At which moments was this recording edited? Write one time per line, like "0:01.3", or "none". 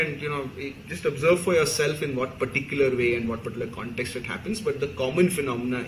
none